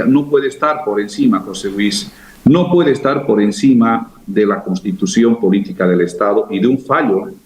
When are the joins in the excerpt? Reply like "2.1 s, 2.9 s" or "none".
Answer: none